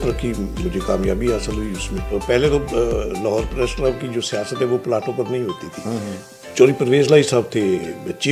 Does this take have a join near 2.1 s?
yes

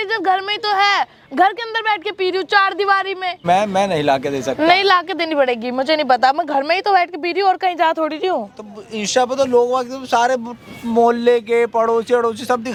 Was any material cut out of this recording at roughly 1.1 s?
no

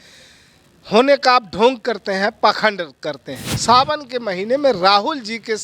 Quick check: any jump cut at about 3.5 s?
yes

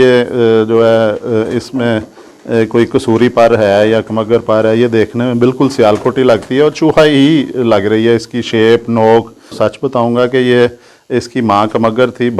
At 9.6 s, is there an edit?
yes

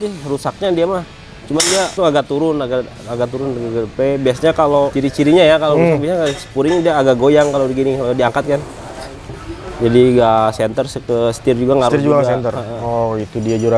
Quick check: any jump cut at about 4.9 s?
yes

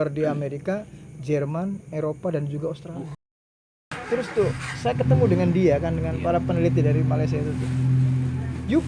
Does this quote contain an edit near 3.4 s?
yes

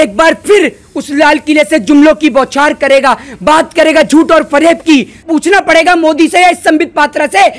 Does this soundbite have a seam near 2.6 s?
no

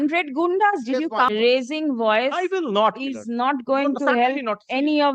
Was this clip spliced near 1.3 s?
yes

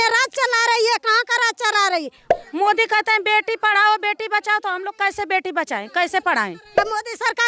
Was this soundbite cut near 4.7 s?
no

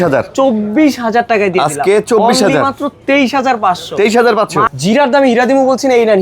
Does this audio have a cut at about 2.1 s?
no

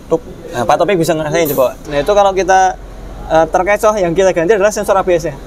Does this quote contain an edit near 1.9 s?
yes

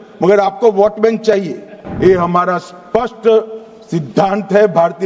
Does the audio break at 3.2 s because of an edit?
no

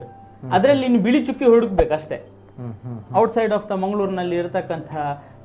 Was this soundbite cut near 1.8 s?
no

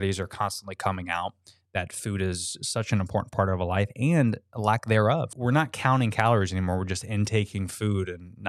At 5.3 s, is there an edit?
yes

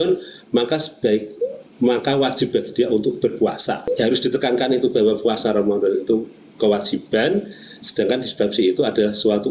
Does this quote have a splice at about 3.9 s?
yes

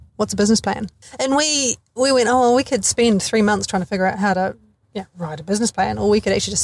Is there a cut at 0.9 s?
yes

